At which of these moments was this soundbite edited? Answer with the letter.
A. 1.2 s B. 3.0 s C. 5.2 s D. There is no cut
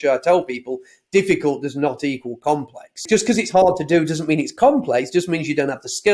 B